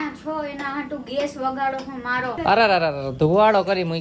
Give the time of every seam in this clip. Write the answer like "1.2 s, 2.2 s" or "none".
2.4 s